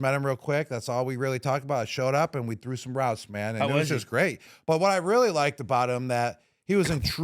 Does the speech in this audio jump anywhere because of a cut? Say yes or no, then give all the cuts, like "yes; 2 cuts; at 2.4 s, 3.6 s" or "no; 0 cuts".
yes; 1 cut; at 4.5 s